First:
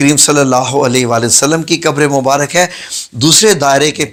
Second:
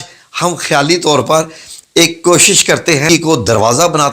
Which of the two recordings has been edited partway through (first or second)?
second